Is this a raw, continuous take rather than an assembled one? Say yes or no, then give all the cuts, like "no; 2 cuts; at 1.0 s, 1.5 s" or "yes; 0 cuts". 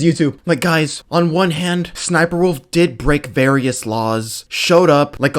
no; 2 cuts; at 1.0 s, 2.0 s